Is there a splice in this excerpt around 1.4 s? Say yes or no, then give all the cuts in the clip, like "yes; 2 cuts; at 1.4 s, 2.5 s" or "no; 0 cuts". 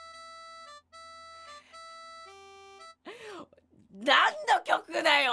no; 0 cuts